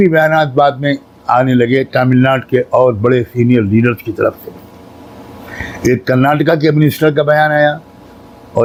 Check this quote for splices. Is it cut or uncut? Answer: uncut